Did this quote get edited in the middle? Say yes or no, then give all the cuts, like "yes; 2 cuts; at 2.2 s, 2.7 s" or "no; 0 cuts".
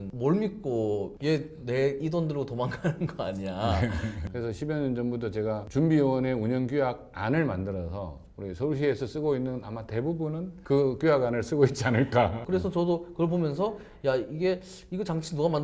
yes; 3 cuts; at 1.1 s, 4.2 s, 12.4 s